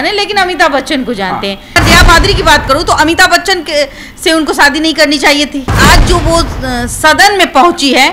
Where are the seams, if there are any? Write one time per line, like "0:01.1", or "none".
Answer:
0:01.7
0:05.8